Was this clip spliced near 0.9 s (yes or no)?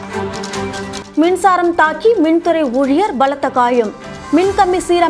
yes